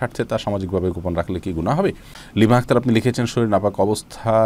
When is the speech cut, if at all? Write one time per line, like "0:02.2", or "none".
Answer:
0:02.1

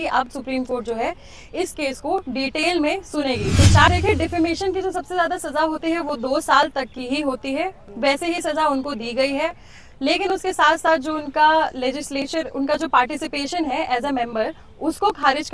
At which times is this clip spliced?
0:03.9

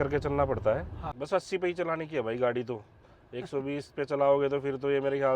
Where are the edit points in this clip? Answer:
0:01.1

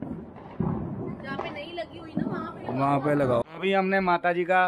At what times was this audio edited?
0:03.5

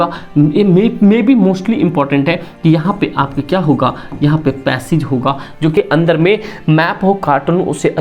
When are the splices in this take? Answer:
0:05.8

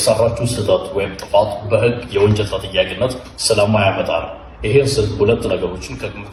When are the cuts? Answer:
none

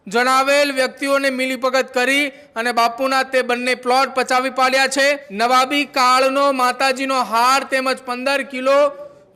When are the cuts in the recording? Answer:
0:05.3

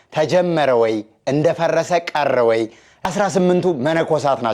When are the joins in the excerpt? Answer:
0:03.1

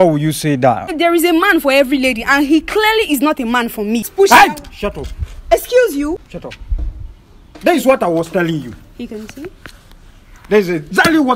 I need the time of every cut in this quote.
0:00.9
0:04.0
0:06.3

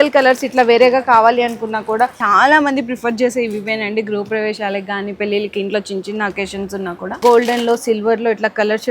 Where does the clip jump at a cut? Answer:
0:02.2
0:07.2

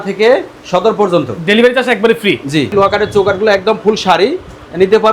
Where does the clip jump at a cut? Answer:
0:02.7

